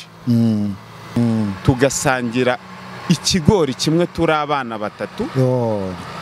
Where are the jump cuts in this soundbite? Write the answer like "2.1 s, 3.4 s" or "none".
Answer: 1.2 s